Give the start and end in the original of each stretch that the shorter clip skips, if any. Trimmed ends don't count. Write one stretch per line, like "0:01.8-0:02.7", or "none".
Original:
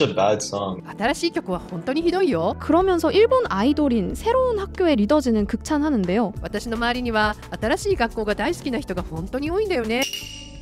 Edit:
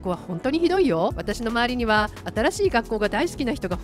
0:02.6-0:06.4

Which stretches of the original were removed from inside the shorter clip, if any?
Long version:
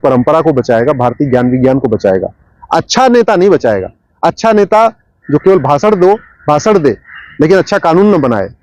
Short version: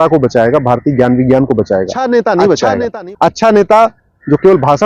0:02.3-0:03.0

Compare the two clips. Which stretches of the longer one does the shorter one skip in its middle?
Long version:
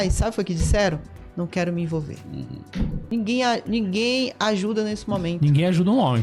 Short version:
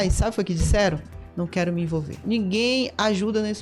0:02.2-0:03.6

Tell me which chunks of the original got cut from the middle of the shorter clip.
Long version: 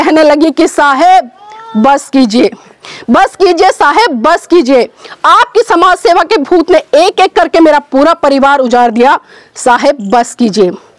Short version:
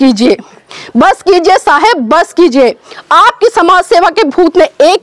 none

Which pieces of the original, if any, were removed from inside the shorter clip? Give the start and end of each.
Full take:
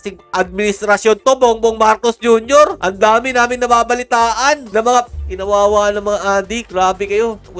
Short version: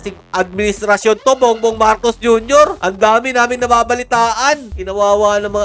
0:04.6-0:05.2

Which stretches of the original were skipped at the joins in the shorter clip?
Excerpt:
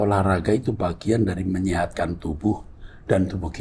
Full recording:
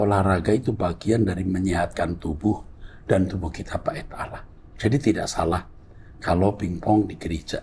none

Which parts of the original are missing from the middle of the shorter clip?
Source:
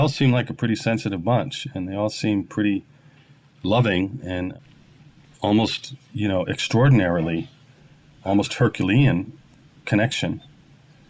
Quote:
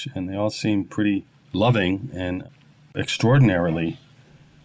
0:03.0-0:03.5
0:05.2-0:06.6

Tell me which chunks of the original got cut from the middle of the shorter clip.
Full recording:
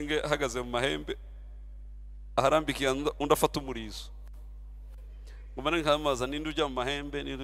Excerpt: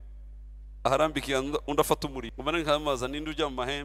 0:03.8-0:05.5

